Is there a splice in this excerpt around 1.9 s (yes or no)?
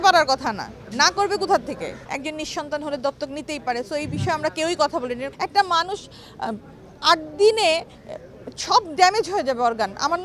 yes